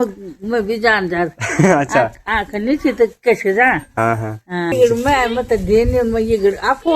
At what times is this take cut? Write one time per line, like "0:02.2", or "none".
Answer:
0:04.7